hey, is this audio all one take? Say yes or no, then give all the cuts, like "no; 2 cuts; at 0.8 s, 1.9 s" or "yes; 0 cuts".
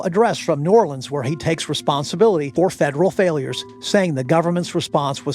no; 1 cut; at 2.5 s